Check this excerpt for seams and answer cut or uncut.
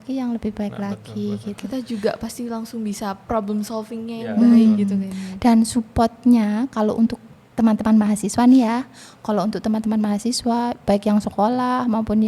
uncut